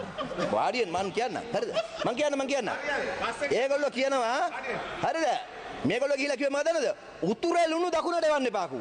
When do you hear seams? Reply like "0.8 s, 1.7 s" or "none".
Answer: none